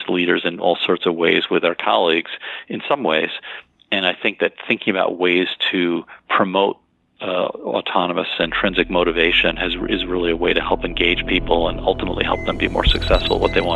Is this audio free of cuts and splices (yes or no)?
yes